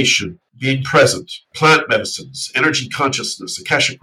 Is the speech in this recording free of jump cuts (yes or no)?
no